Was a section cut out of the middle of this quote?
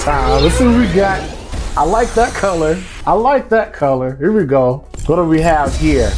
yes; 2 cuts; at 2.9 s, 4.9 s

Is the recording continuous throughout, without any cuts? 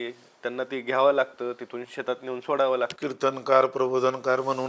no; 1 cut; at 3.0 s

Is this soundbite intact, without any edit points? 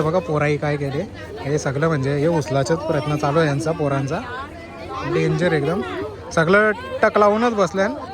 yes; 0 cuts

